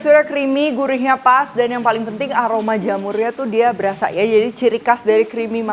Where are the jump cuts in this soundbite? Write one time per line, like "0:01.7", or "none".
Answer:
none